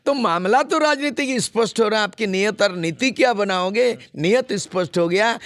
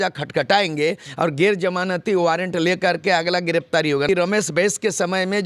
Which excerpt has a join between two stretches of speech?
second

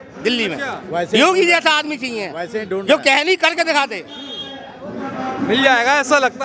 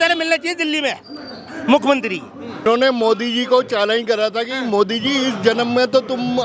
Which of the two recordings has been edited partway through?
second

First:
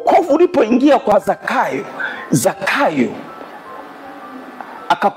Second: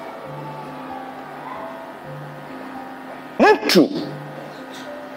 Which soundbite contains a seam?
first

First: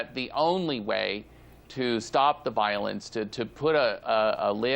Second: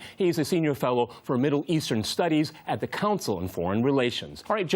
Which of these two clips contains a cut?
first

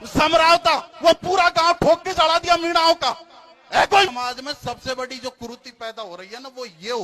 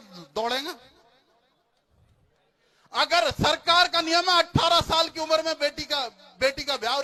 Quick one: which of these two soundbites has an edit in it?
first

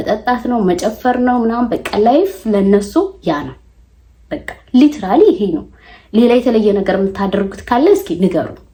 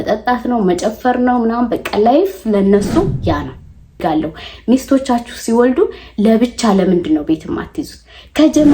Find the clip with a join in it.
second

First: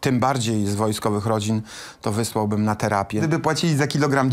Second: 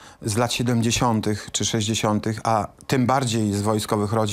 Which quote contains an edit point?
first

